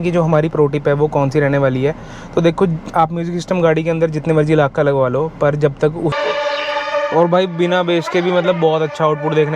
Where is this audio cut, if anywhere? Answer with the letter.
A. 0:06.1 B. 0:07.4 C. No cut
A